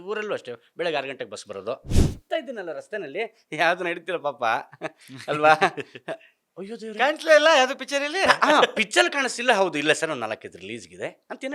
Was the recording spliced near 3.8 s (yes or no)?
no